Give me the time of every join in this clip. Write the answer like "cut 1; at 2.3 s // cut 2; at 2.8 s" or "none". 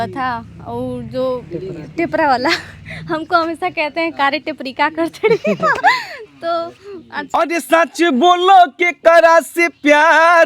cut 1; at 7.3 s